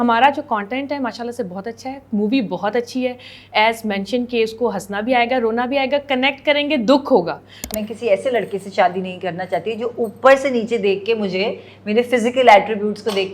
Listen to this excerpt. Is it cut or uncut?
cut